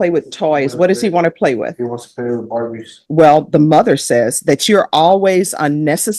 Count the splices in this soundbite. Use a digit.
1